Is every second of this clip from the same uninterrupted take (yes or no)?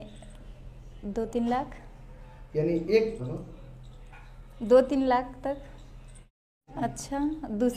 no